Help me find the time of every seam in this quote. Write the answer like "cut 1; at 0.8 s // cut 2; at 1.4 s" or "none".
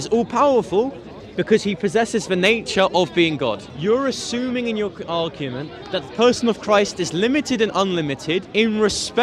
cut 1; at 3.7 s // cut 2; at 8.5 s